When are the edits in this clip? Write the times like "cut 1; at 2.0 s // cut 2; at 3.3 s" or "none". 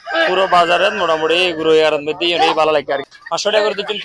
cut 1; at 3.1 s